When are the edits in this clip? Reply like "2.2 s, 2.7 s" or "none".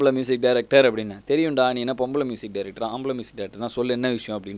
none